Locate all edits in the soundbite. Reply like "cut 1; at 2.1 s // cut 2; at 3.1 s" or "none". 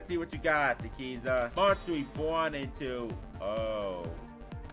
cut 1; at 1.5 s